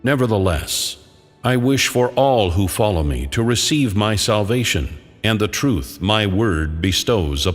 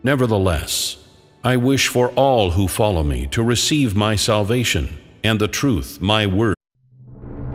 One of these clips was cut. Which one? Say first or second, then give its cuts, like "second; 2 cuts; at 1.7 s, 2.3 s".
first; 1 cut; at 6.6 s